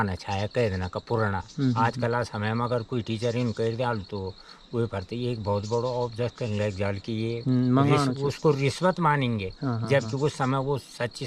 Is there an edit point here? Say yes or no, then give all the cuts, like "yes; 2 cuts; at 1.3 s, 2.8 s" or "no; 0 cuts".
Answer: yes; 1 cut; at 1.5 s